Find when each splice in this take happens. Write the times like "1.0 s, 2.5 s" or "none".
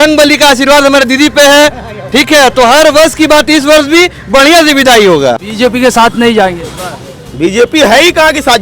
5.5 s